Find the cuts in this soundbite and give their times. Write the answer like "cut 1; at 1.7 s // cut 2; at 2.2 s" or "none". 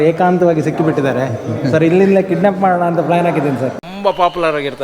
cut 1; at 3.8 s